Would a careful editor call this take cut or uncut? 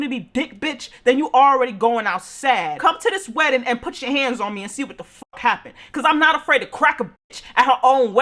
uncut